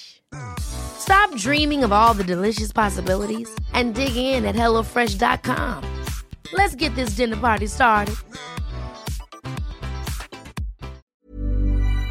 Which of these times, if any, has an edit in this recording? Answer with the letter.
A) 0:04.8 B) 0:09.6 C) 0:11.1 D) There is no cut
C